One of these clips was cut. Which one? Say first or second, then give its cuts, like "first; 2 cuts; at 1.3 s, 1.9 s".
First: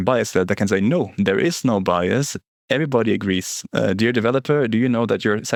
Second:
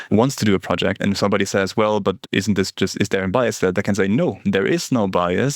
second; 1 cut; at 1.0 s